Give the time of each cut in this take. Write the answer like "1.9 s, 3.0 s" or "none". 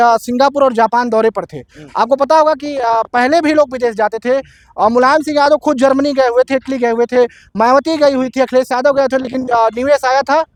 none